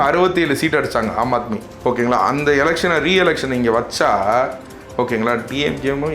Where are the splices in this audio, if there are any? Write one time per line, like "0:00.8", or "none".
0:01.6